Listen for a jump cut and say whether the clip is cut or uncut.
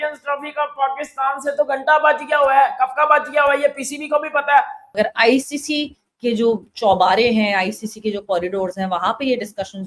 cut